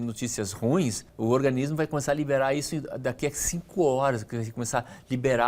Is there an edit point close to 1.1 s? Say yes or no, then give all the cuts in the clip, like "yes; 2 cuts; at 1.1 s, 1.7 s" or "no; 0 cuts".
yes; 1 cut; at 1.1 s